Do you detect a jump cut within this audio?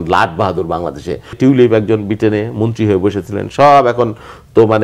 yes; 1 cut; at 1.4 s

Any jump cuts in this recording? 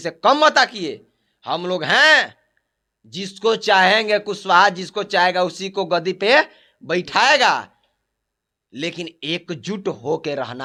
no; 0 cuts

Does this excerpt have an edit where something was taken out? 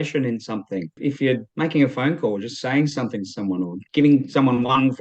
yes; 2 cuts; at 0.9 s, 3.8 s

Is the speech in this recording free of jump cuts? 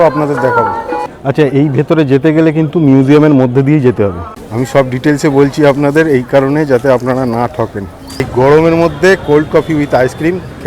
no; 3 cuts; at 1.0 s, 4.3 s, 8.3 s

